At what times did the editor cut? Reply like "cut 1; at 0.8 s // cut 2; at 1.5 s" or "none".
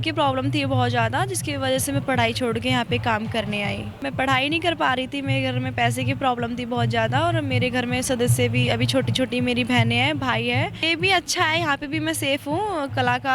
cut 1; at 3.9 s // cut 2; at 10.8 s